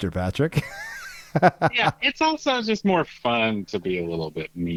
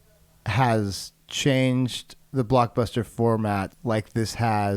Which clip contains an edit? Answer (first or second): second